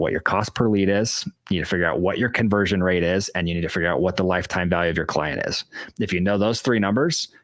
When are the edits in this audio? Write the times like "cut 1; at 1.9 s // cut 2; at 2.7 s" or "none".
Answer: none